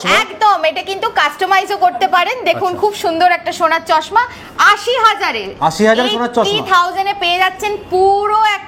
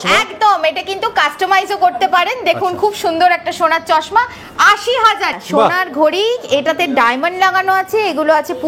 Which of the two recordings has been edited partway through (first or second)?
second